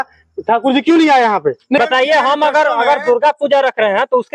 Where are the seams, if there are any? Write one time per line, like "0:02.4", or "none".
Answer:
0:01.8